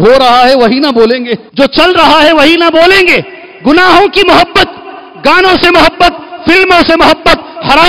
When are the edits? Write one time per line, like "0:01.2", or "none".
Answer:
0:01.4